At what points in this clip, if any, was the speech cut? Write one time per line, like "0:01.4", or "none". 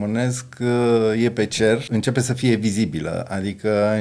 0:01.9